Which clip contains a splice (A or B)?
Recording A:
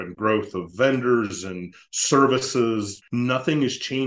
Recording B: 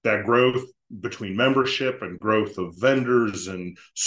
A